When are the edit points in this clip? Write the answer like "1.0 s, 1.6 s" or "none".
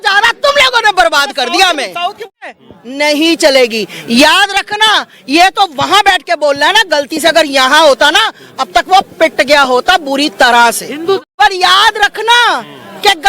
2.4 s, 11.2 s

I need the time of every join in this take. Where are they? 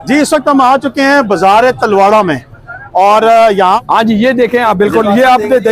3.8 s

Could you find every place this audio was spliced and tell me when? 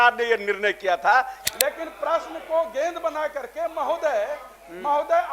1.4 s

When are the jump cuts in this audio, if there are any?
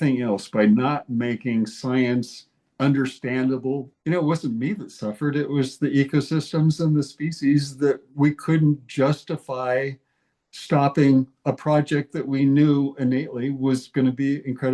3.9 s

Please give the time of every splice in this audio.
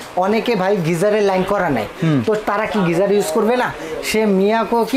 none

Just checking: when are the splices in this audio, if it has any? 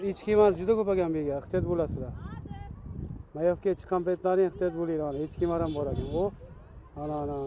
none

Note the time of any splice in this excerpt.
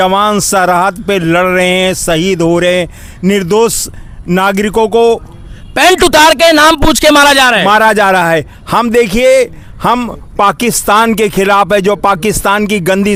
none

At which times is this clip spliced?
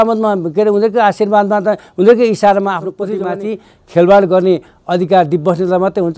3.0 s

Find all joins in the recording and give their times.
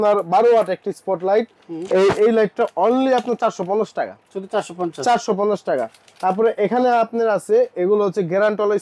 none

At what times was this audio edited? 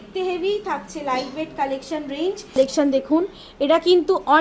2.6 s

